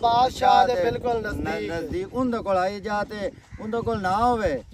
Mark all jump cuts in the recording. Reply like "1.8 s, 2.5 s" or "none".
none